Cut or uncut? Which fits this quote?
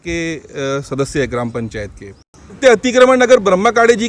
cut